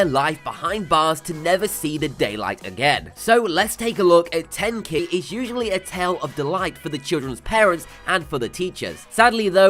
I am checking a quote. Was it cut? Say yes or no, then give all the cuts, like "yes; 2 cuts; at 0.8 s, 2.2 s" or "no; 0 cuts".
no; 0 cuts